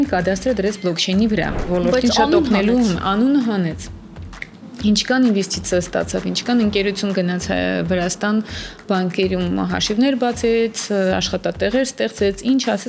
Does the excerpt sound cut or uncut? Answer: cut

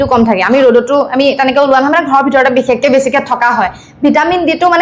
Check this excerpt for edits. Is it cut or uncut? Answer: uncut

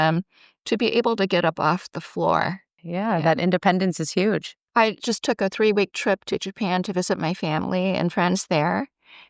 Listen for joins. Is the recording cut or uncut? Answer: cut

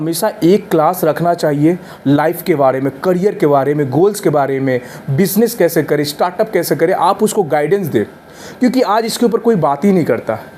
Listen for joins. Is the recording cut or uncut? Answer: uncut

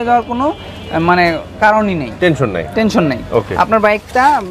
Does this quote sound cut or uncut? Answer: uncut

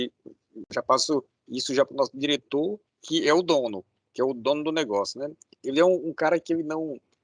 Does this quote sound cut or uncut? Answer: uncut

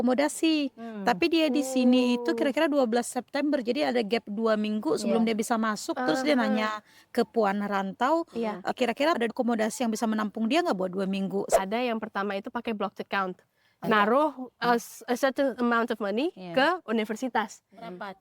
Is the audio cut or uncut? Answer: cut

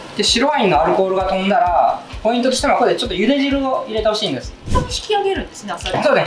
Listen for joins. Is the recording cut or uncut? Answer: cut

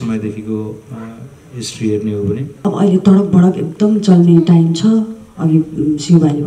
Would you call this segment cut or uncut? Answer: cut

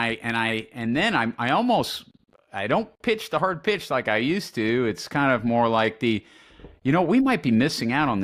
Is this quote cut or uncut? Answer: uncut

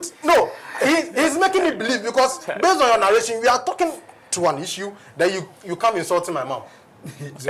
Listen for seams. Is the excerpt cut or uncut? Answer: uncut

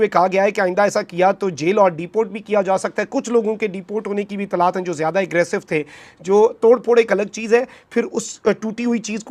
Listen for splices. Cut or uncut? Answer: uncut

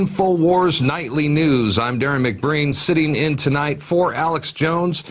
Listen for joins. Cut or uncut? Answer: cut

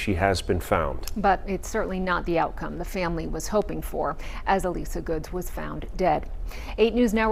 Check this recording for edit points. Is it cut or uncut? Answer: uncut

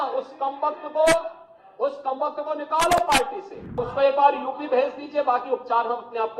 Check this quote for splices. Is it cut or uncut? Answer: cut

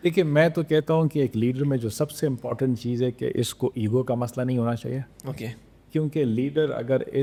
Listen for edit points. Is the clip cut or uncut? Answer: uncut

